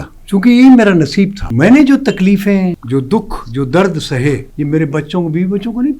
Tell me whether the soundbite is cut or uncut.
cut